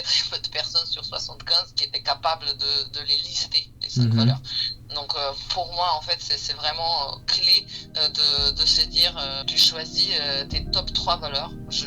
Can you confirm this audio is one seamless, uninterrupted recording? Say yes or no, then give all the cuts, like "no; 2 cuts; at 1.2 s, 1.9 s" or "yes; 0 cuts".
no; 1 cut; at 9.4 s